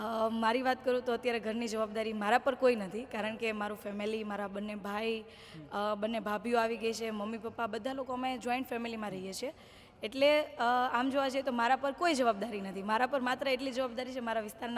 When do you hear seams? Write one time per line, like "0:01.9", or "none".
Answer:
none